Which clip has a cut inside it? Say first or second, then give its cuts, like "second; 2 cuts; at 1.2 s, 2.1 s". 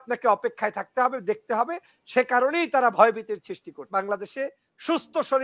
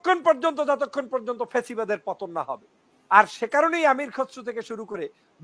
first; 1 cut; at 3.9 s